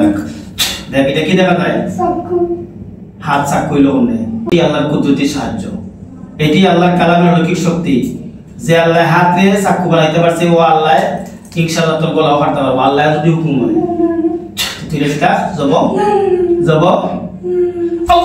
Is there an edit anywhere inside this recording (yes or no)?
yes